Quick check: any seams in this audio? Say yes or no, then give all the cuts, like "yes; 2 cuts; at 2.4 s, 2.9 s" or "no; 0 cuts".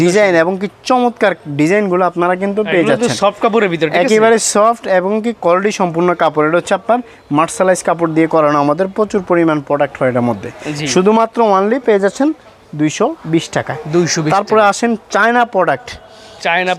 no; 0 cuts